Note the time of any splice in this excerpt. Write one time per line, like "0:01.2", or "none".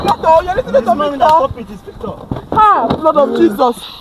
none